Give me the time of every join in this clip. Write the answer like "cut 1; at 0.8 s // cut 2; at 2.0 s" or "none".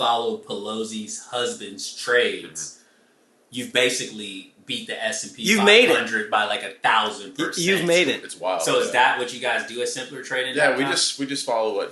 none